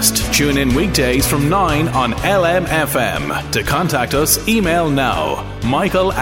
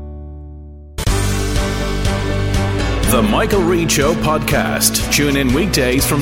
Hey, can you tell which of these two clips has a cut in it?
second; 1 cut; at 0.9 s

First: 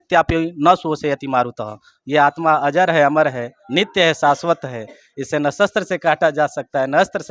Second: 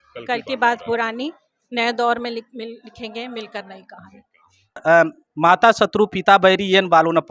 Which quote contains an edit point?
second; 1 cut; at 4.8 s

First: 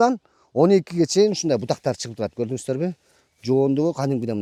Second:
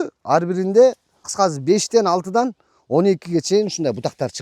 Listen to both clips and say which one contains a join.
second; 1 cut; at 1.2 s

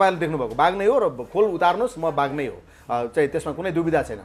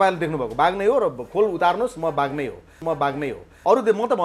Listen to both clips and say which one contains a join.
second; 1 cut; at 3.1 s

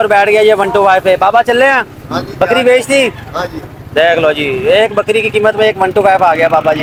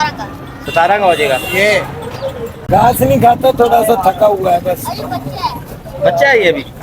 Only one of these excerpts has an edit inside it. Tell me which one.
second; 1 cut; at 2.5 s

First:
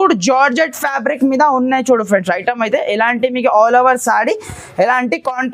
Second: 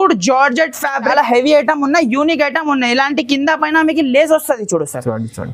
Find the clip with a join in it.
second; 1 cut; at 1.1 s

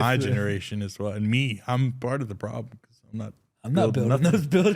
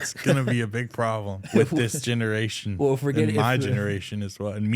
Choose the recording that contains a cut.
second; 1 cut; at 1.4 s

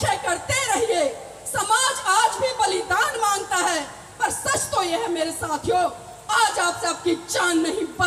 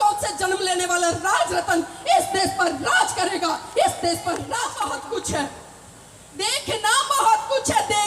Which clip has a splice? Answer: second; 1 cut; at 4.8 s

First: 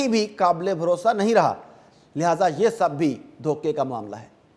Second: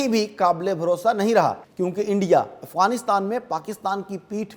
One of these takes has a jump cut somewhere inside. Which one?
second; 1 cut; at 1.7 s

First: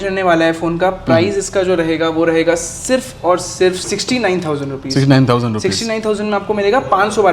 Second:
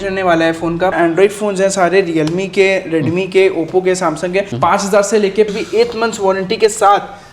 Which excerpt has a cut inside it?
second; 3 cuts; at 0.9 s, 4.5 s, 5.5 s

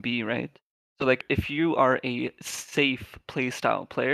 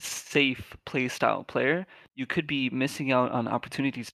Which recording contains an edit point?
first; 1 cut; at 1.2 s

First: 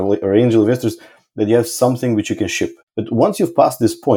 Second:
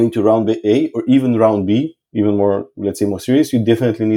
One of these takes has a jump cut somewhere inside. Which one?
first; 1 cut; at 2.9 s

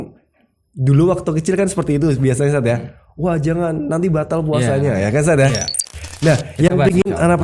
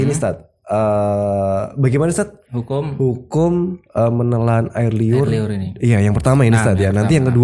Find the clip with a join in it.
first; 1 cut; at 5.9 s

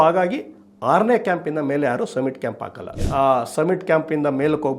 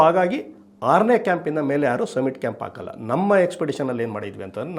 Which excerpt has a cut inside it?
first; 1 cut; at 3.0 s

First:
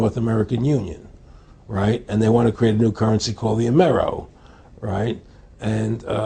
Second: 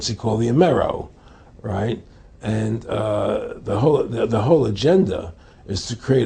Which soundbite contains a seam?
first; 1 cut; at 1.0 s

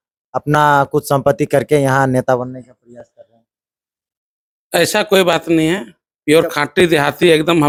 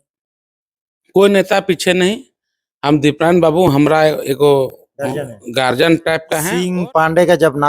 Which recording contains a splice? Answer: second; 1 cut; at 6.0 s

